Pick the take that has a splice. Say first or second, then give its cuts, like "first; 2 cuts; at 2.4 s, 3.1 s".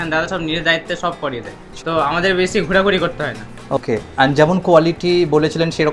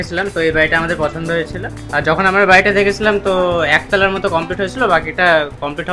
first; 2 cuts; at 1.7 s, 3.8 s